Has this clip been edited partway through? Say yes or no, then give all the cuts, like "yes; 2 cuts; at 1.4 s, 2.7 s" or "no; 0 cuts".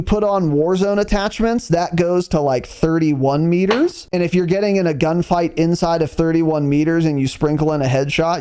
yes; 1 cut; at 4.0 s